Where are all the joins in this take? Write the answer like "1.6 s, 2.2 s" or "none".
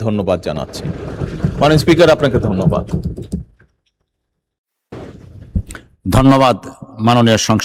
none